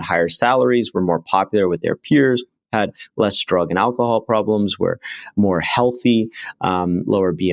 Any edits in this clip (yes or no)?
no